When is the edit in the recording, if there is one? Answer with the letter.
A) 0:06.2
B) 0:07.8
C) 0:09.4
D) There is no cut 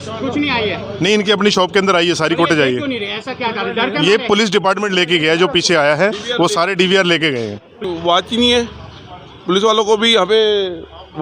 B